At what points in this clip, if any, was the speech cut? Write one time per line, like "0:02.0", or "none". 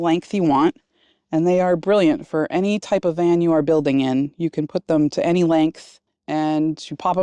0:06.1